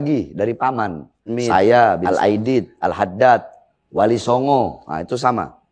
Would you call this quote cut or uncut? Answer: cut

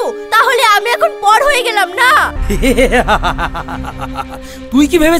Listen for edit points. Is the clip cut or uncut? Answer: cut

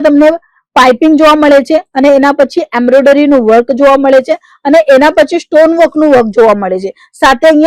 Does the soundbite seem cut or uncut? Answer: uncut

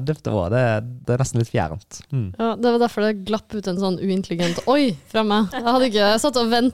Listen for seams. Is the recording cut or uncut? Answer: cut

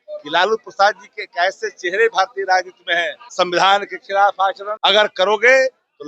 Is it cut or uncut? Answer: cut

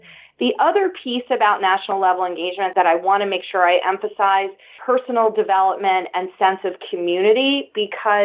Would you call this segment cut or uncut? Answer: cut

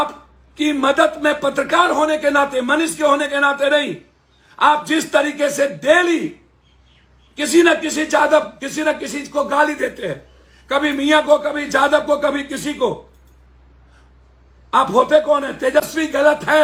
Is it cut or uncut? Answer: uncut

